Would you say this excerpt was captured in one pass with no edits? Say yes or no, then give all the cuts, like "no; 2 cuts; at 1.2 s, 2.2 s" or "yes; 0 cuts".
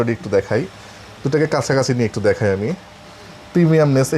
yes; 0 cuts